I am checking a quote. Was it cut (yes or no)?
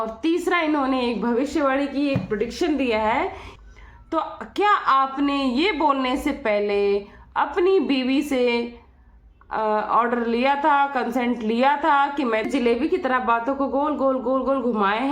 yes